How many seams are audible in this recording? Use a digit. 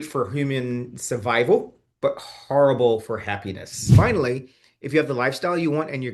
2